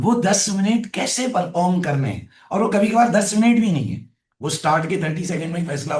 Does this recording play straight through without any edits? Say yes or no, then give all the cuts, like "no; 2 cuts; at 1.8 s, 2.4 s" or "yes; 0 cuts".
yes; 0 cuts